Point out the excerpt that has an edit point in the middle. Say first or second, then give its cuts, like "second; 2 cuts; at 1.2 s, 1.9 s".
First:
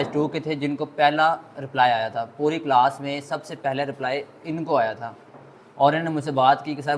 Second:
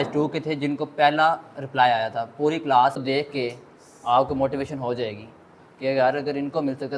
second; 1 cut; at 3.0 s